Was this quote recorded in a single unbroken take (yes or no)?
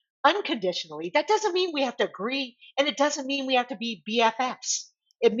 yes